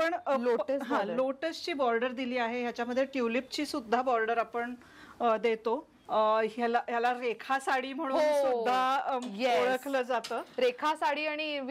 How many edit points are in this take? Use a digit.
1